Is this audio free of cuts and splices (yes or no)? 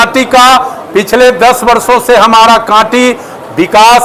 yes